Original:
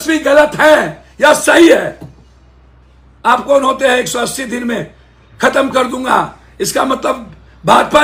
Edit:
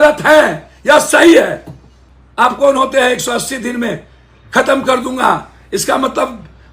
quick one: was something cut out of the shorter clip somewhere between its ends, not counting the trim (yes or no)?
yes